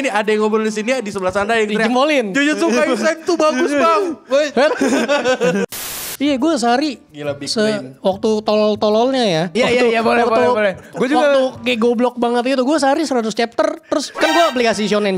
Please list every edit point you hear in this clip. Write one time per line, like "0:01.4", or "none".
0:05.7
0:09.5
0:14.1